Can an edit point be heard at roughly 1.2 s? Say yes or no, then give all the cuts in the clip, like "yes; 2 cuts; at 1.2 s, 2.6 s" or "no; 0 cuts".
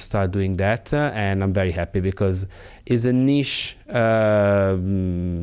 no; 0 cuts